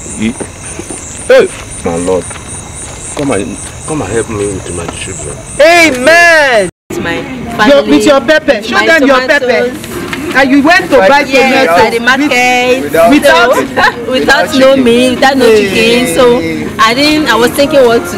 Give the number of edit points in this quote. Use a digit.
1